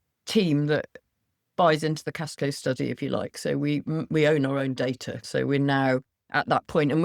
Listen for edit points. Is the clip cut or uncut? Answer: cut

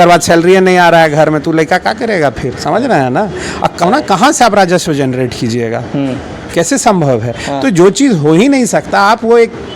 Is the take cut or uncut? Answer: cut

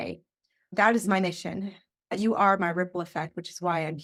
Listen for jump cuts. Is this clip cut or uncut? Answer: uncut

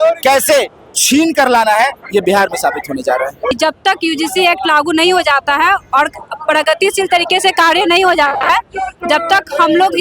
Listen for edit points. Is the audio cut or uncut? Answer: cut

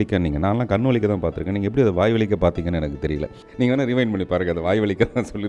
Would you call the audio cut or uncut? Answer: cut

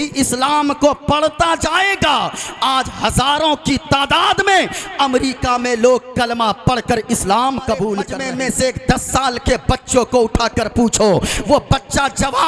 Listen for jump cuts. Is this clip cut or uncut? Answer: cut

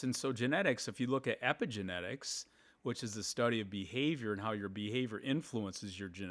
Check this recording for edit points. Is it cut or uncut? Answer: uncut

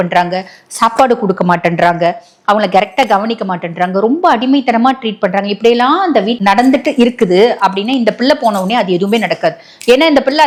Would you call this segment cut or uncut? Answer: uncut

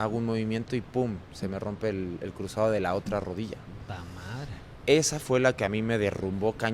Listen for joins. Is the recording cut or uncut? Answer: uncut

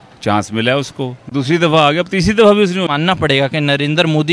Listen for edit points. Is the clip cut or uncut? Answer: cut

